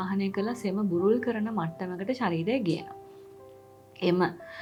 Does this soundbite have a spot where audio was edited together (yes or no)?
no